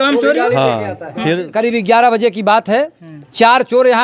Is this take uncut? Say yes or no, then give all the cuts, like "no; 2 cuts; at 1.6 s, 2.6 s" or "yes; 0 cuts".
no; 1 cut; at 1.5 s